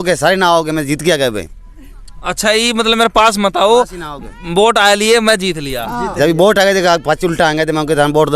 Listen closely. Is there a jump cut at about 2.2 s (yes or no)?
no